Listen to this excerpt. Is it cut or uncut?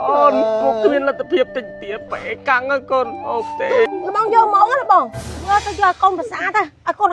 cut